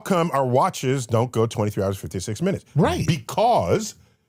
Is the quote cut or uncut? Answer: uncut